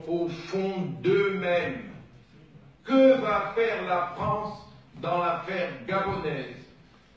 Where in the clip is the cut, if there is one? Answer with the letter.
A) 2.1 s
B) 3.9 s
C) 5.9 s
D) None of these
B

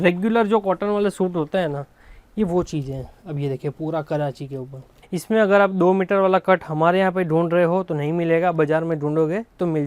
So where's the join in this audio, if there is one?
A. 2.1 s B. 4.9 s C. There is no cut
B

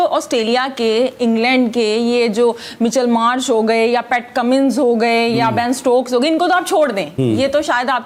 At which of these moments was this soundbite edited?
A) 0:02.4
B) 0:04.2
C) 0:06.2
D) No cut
D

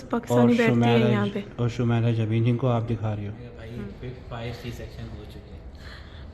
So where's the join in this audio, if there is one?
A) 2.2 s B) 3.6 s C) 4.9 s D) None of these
B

